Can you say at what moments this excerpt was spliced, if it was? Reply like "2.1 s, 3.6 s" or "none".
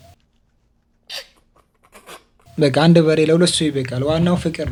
none